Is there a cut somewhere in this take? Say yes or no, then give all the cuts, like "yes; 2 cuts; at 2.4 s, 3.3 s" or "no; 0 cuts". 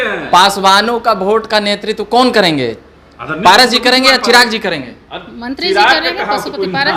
no; 0 cuts